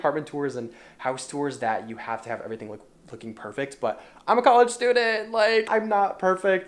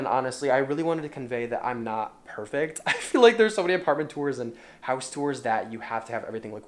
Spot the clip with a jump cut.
first; 1 cut; at 5.7 s

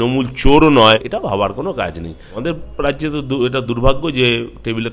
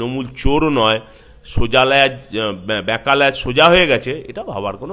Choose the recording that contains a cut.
first; 2 cuts; at 1.1 s, 2.4 s

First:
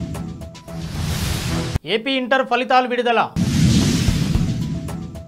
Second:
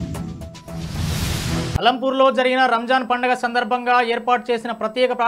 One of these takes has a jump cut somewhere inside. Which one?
second; 1 cut; at 1.7 s

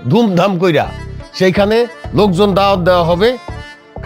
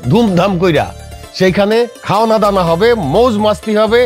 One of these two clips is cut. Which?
second; 1 cut; at 2.0 s

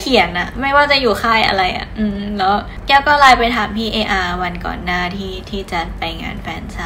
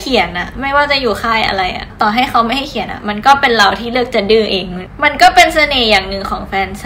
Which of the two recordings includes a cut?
second; 2 cuts; at 1.9 s, 4.9 s

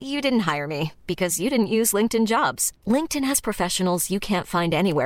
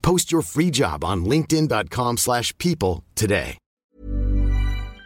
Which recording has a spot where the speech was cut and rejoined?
second; 1 cut; at 3.8 s

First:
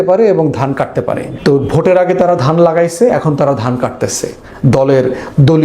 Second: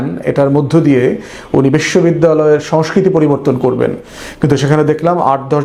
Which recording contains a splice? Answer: first; 1 cut; at 1.3 s

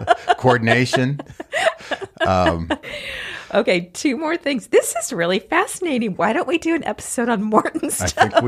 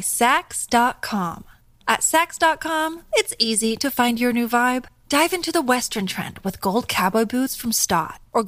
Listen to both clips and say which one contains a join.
first; 1 cut; at 2.9 s

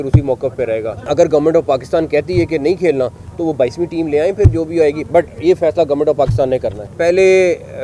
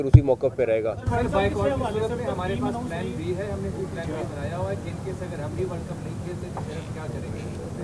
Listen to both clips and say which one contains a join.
first; 2 cuts; at 1.1 s, 6.8 s

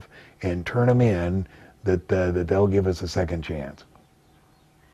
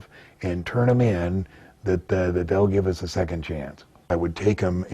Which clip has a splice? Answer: second; 1 cut; at 3.9 s

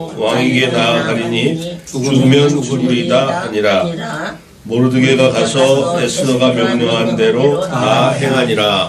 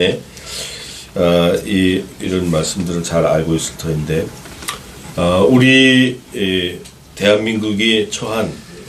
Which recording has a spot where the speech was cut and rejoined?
first; 1 cut; at 6.6 s

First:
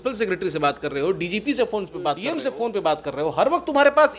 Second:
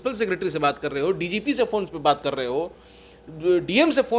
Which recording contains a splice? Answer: first; 1 cut; at 2.2 s

